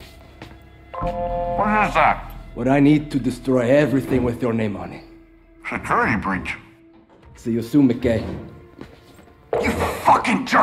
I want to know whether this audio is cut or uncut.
uncut